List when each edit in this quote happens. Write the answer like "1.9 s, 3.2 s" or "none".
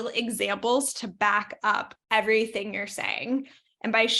2.0 s